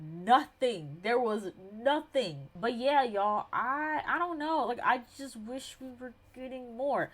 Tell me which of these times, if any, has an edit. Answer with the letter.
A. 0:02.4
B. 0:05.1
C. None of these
A